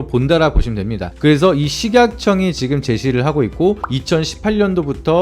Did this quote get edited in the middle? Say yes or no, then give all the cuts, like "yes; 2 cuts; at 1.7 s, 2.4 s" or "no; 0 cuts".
yes; 1 cut; at 1.0 s